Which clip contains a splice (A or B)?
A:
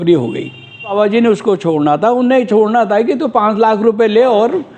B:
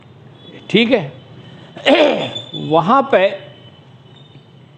A